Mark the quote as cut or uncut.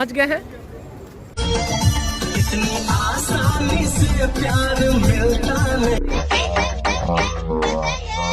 cut